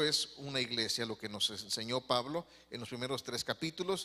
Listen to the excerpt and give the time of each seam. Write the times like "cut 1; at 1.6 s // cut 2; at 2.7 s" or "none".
cut 1; at 1.2 s